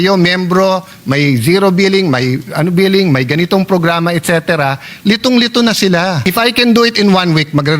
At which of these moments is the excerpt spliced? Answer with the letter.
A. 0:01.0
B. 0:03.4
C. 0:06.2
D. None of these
C